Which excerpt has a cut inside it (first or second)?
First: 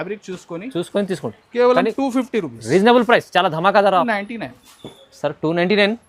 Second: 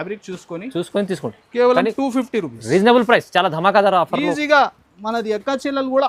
first